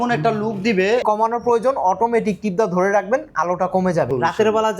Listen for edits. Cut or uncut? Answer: cut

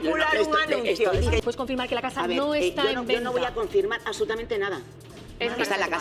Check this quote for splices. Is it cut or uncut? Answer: uncut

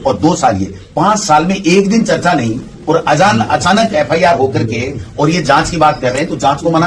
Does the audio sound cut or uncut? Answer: uncut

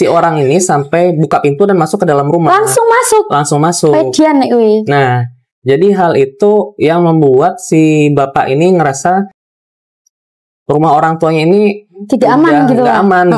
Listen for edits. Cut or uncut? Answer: uncut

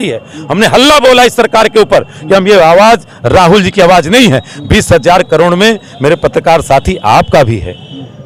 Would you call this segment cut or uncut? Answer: uncut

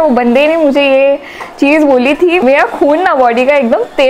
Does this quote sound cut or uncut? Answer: uncut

